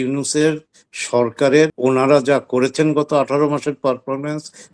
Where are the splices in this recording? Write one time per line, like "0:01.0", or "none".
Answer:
0:01.7